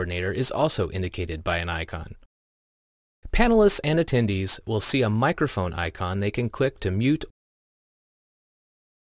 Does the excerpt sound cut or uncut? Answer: uncut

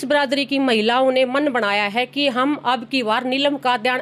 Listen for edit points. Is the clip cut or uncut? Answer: uncut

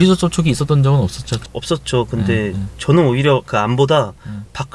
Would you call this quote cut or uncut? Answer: uncut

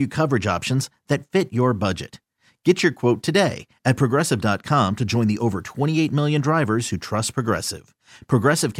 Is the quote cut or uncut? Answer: uncut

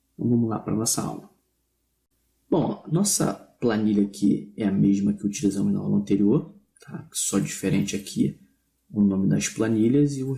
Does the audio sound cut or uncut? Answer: cut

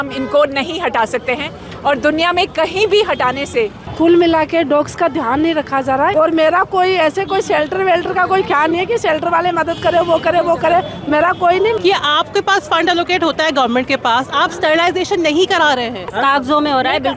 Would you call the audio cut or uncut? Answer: cut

